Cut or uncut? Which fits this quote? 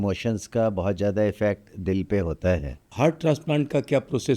cut